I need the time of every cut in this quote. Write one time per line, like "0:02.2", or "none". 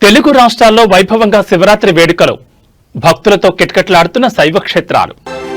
none